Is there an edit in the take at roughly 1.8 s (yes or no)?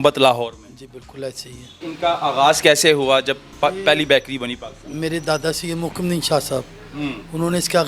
yes